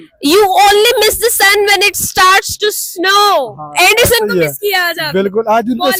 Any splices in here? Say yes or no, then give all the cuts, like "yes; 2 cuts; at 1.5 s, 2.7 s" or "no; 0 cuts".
no; 0 cuts